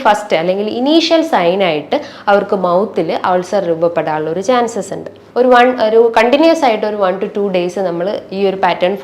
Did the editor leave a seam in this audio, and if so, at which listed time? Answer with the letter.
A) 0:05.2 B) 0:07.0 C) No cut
A